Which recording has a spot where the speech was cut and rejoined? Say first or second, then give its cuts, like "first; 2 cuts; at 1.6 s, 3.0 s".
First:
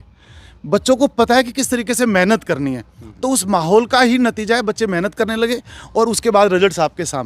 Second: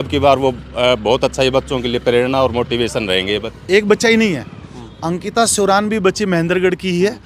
second; 1 cut; at 3.5 s